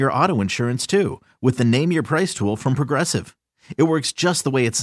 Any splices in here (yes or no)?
no